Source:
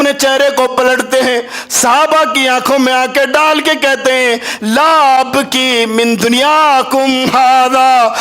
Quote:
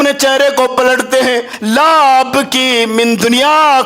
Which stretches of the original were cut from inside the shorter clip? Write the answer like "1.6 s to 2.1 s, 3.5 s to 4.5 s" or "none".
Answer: 1.5 s to 4.5 s

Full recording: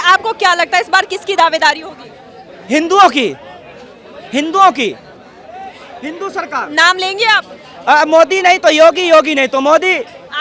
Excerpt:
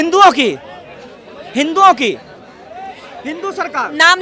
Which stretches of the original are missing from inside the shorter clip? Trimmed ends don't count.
none

